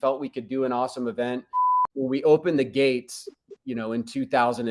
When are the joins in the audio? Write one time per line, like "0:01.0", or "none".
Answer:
0:01.8